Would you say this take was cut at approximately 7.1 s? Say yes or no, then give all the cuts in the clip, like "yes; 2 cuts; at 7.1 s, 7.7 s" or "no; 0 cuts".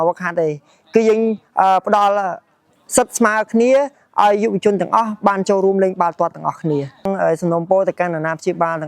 yes; 1 cut; at 7.1 s